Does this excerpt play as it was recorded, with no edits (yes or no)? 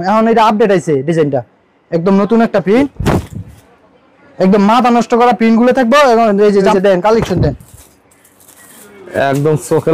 no